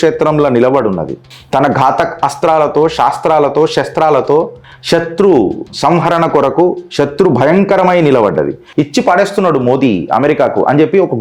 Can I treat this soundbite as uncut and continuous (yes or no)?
no